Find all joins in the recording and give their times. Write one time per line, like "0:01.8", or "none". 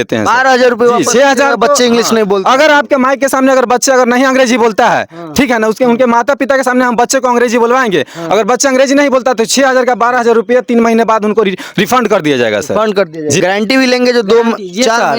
0:13.4